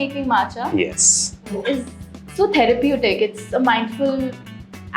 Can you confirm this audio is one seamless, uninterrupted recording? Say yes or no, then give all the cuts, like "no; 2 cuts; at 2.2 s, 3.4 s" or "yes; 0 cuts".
yes; 0 cuts